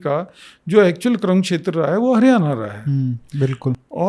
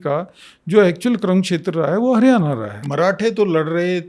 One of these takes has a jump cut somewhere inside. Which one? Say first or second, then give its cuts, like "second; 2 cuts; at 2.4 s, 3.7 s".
second; 1 cut; at 2.8 s